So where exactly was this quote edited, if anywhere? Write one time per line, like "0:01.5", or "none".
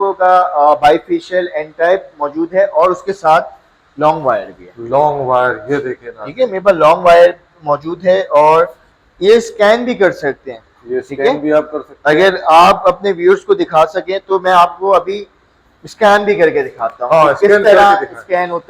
none